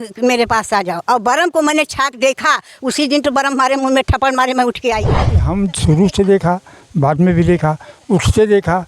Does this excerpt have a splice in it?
yes; 1 cut; at 5.5 s

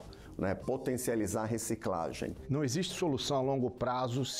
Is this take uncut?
no; 1 cut; at 2.3 s

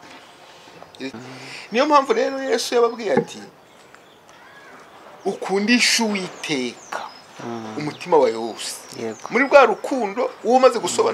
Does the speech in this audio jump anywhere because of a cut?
yes; 1 cut; at 1.1 s

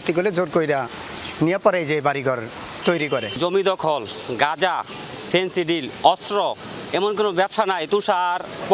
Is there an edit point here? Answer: no; 0 cuts

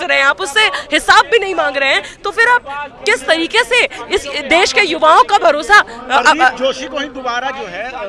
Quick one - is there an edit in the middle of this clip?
no; 0 cuts

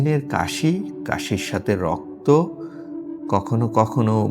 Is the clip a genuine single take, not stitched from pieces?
yes; 0 cuts

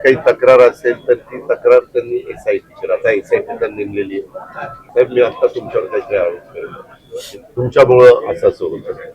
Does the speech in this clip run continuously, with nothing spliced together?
no; 1 cut; at 4.8 s

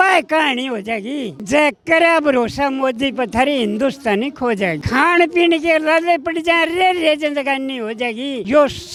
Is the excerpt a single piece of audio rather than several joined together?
yes; 0 cuts

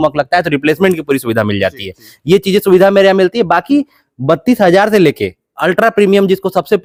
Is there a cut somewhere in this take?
no; 0 cuts

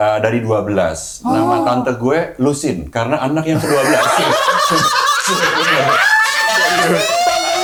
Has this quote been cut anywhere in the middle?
no; 0 cuts

